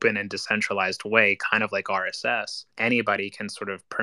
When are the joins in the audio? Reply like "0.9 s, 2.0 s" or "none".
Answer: 2.6 s